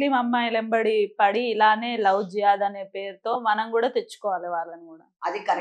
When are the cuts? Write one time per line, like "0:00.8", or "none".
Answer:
none